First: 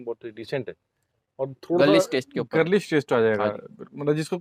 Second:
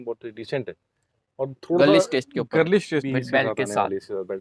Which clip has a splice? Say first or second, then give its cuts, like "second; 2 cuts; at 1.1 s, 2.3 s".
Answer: second; 1 cut; at 3.0 s